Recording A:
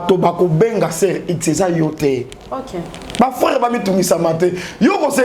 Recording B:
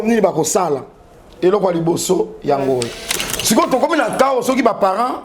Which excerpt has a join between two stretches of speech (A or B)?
B